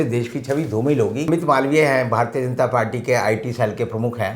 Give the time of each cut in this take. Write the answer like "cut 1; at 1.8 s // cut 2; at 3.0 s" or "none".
cut 1; at 1.3 s

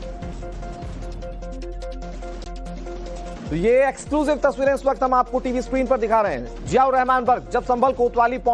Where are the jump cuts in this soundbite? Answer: cut 1; at 6.9 s

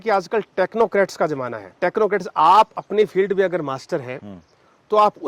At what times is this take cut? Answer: cut 1; at 1.6 s

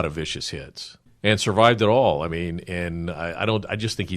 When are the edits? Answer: cut 1; at 1.1 s

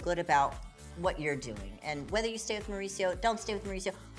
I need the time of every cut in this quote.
none

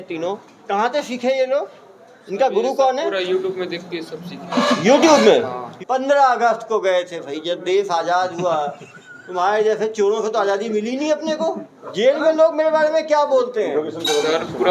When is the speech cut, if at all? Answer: cut 1; at 5.6 s // cut 2; at 11.8 s

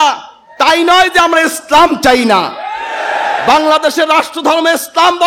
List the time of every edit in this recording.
none

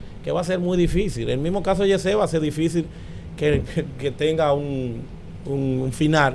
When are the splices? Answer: none

